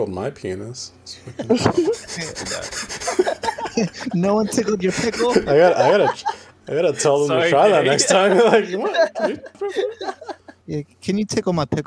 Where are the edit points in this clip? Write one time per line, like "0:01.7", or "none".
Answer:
0:09.6
0:10.5